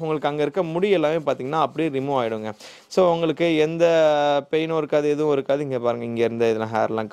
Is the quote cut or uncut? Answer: uncut